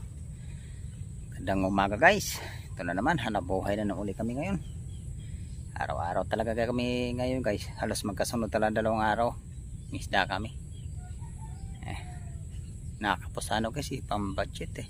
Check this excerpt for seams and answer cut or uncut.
uncut